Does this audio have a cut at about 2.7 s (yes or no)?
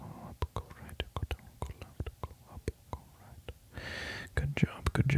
no